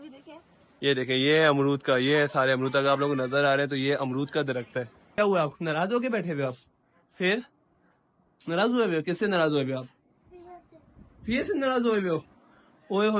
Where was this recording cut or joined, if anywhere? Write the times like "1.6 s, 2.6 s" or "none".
5.1 s